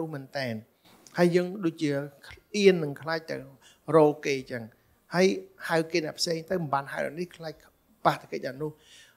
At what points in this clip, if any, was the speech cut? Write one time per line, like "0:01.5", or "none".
none